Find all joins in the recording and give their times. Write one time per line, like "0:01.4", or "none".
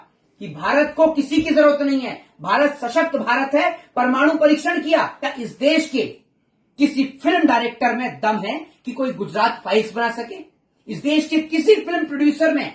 0:05.3